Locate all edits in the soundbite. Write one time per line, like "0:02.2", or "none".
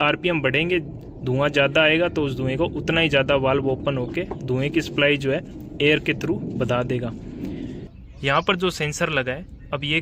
0:07.8